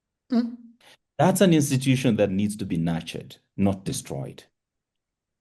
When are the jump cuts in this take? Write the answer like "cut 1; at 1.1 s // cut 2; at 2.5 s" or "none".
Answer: none